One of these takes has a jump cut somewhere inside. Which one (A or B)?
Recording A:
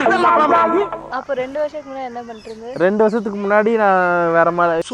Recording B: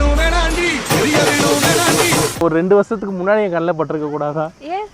B